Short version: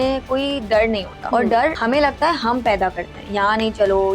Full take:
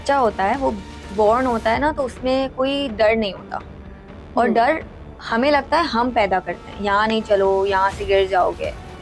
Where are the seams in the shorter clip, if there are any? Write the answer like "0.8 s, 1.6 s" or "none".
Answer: 1.2 s, 1.8 s